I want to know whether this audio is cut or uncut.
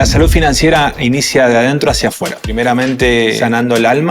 cut